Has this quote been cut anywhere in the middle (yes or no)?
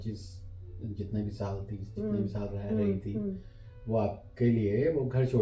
no